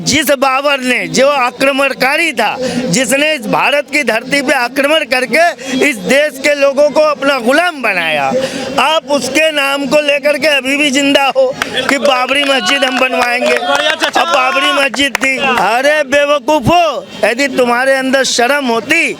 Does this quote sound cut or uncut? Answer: cut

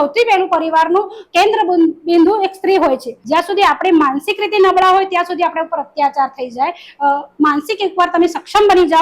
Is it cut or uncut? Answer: cut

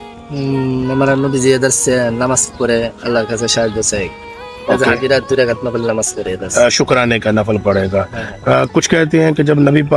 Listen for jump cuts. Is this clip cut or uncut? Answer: uncut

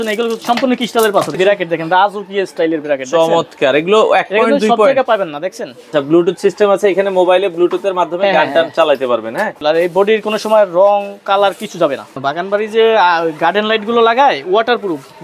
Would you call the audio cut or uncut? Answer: cut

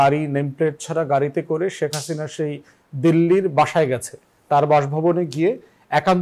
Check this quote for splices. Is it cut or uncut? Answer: uncut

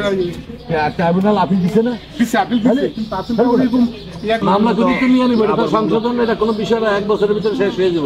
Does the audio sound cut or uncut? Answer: cut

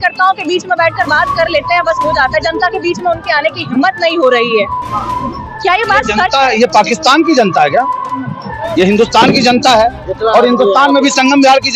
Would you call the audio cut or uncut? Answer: uncut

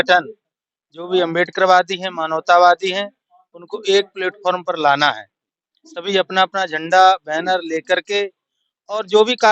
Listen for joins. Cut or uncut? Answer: uncut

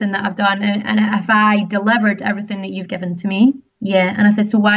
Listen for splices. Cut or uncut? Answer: cut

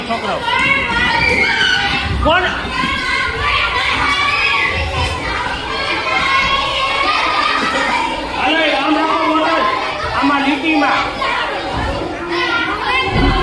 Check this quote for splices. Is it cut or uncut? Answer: uncut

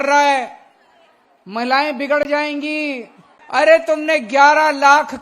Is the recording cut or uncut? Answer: cut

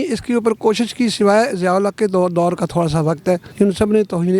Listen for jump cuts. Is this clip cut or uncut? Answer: cut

